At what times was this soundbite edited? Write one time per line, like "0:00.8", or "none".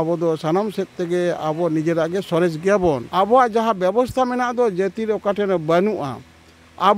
0:03.1